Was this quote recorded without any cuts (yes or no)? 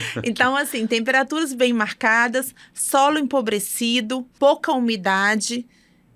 no